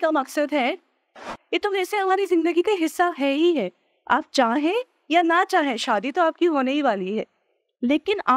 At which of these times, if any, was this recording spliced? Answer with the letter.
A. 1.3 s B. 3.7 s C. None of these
A